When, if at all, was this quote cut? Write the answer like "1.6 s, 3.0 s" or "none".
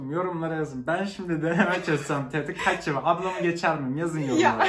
none